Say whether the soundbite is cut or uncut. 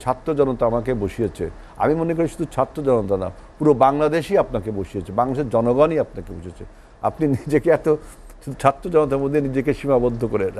uncut